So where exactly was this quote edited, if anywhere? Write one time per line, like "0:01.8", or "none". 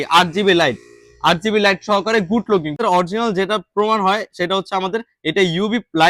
0:02.8